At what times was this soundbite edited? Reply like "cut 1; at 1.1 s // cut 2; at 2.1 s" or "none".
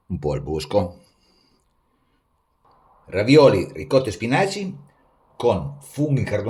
cut 1; at 2.6 s